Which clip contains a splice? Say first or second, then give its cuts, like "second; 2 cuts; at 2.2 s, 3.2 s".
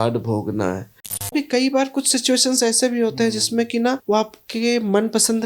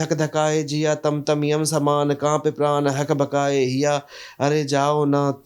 first; 2 cuts; at 1.3 s, 4.0 s